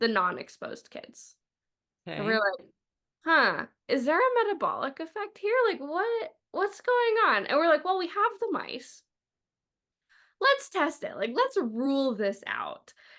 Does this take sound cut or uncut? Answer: uncut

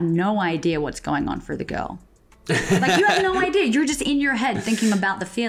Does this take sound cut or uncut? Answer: uncut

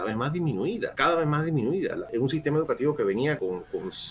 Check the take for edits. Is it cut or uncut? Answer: cut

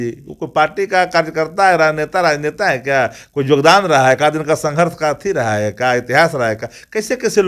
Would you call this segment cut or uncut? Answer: uncut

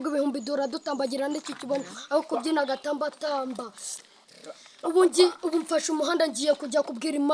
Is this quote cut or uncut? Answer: uncut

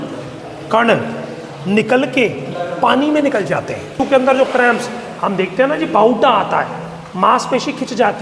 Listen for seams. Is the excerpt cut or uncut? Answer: cut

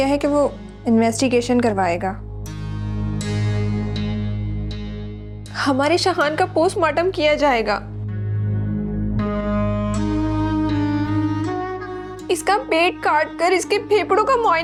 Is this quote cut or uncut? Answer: uncut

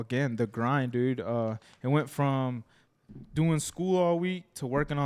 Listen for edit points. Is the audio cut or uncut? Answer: uncut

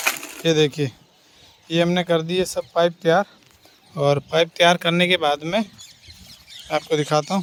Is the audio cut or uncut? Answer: uncut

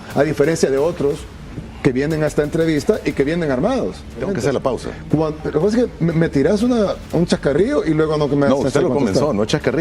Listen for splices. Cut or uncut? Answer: cut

